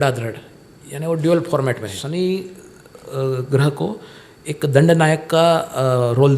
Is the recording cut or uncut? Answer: cut